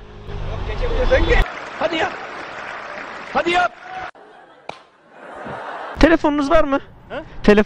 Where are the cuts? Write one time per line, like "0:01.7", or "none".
0:05.9